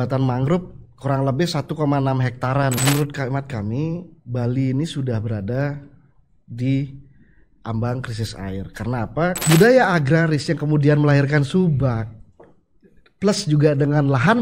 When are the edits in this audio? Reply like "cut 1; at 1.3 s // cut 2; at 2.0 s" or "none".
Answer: cut 1; at 2.8 s // cut 2; at 9.4 s

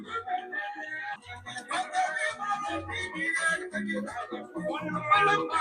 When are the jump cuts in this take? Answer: cut 1; at 1.2 s

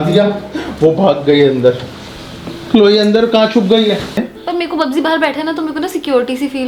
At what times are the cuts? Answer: cut 1; at 4.2 s

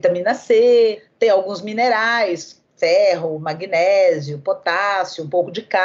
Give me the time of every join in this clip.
cut 1; at 1.0 s

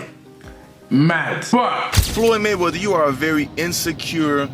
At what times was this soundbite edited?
cut 1; at 2.0 s

